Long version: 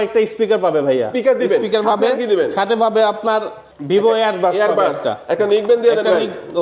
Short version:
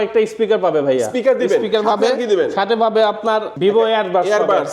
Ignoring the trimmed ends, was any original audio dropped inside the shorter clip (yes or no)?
yes